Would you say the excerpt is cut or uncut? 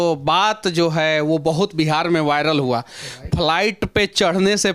uncut